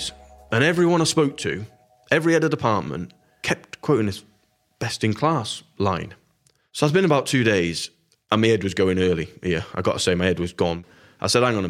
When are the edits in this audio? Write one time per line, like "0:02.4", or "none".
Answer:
0:10.8

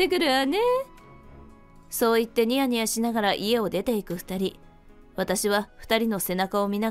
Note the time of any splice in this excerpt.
none

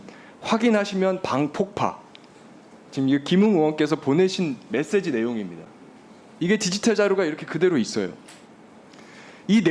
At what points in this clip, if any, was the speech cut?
none

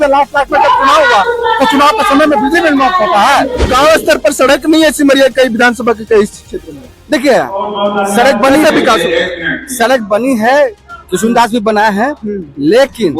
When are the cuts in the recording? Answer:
0:03.6

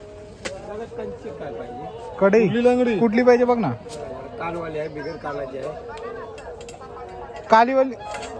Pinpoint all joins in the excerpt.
none

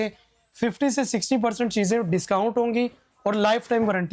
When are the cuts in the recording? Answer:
none

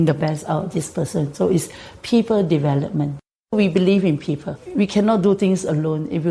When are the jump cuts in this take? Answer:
0:03.5
0:04.6

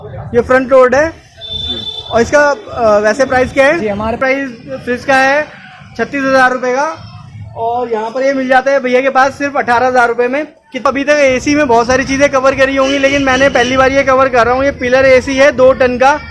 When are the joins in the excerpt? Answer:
0:04.2
0:10.7

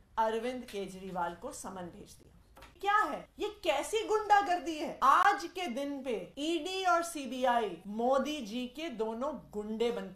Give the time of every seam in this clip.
0:02.8
0:03.3
0:04.9
0:06.3
0:07.8

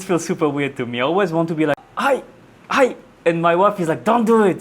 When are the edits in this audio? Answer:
0:01.9

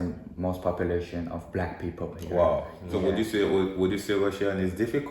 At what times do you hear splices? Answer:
0:02.8

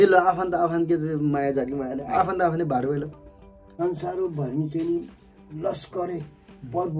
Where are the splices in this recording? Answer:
0:03.1

